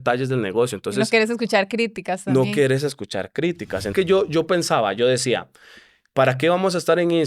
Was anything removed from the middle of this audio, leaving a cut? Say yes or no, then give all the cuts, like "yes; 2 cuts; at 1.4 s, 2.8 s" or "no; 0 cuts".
yes; 1 cut; at 3.9 s